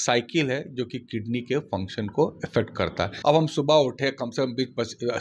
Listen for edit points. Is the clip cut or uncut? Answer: cut